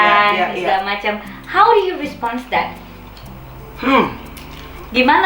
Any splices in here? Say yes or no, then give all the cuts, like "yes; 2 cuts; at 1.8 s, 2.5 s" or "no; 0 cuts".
no; 0 cuts